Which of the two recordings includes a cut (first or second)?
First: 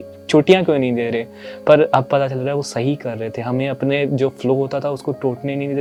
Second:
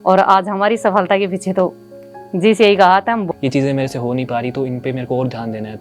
second